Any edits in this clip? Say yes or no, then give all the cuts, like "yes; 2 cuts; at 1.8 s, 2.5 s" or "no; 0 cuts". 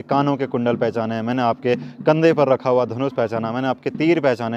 no; 0 cuts